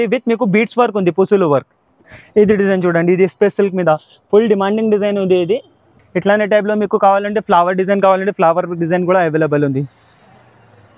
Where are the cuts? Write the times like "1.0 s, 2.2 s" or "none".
none